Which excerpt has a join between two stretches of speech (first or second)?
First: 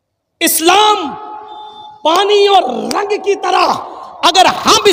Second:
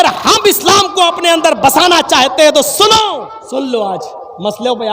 second